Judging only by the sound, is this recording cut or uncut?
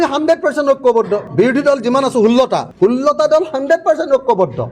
uncut